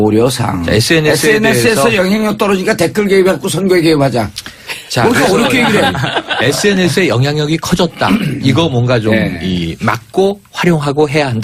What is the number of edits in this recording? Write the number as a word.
zero